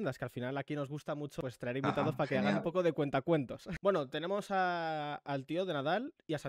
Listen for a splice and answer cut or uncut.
cut